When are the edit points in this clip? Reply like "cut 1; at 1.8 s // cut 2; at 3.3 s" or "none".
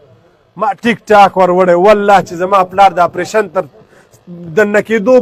none